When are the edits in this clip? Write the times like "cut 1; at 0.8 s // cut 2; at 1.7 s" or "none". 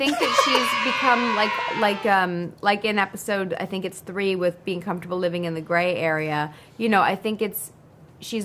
none